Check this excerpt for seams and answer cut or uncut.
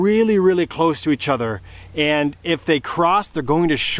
uncut